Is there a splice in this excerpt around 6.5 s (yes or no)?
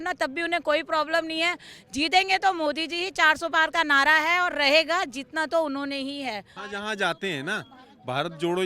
yes